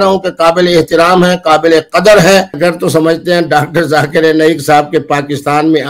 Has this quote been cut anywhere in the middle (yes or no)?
yes